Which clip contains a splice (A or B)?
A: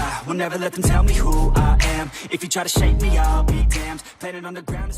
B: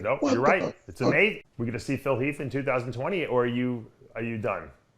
B